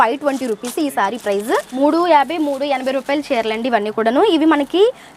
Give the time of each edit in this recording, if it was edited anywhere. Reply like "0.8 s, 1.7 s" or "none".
1.7 s